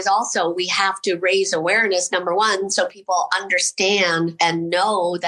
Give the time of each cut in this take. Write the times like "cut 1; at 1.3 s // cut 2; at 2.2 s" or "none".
cut 1; at 4.3 s